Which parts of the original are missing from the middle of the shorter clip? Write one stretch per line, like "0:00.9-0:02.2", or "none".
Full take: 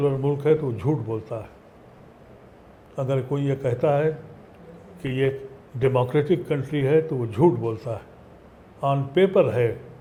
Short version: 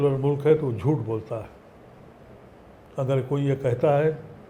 none